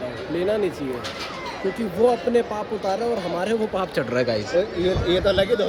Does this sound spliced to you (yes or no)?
no